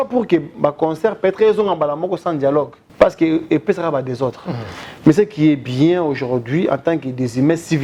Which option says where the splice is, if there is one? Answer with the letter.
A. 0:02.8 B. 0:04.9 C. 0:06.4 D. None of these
A